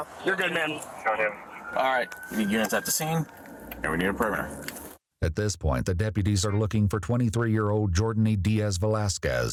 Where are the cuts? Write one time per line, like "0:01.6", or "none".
none